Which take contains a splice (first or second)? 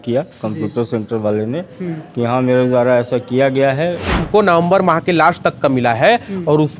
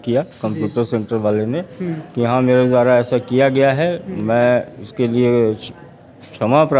first